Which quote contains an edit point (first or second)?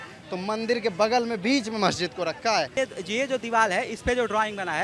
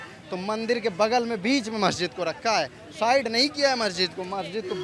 first